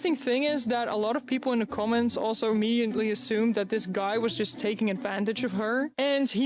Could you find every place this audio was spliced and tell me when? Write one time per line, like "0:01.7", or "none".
none